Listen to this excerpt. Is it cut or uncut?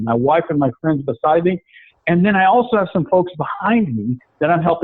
uncut